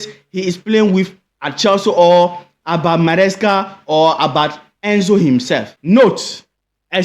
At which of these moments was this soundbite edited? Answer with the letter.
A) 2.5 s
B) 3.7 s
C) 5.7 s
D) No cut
C